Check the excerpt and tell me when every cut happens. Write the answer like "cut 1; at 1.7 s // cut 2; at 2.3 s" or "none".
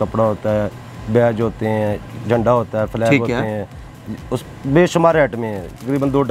none